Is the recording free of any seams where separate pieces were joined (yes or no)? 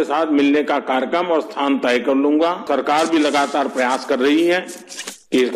no